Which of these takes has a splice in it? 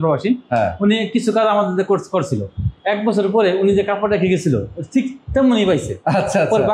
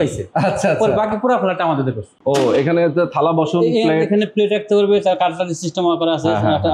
second; 1 cut; at 2.1 s

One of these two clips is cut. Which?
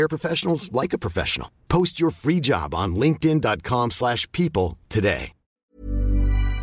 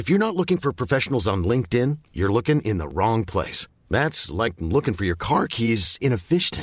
first; 1 cut; at 5.6 s

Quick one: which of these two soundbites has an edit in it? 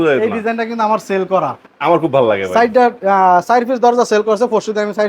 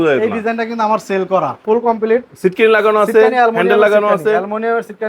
second; 1 cut; at 1.6 s

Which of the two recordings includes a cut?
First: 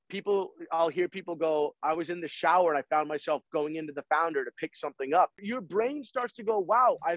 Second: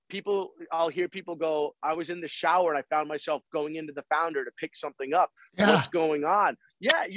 first; 1 cut; at 5.4 s

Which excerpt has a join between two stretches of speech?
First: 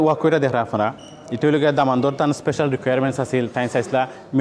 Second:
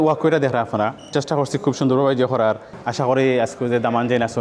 second; 2 cuts; at 1.1 s, 2.7 s

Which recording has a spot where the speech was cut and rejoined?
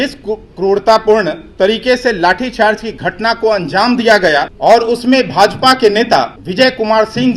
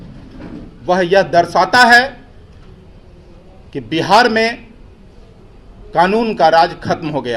first; 2 cuts; at 4.5 s, 6.4 s

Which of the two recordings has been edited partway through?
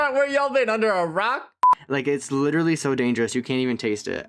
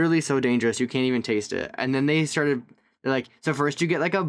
first; 1 cut; at 1.6 s

